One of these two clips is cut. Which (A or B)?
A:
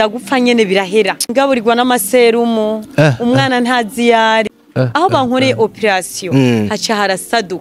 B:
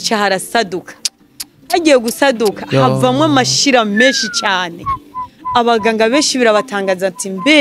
A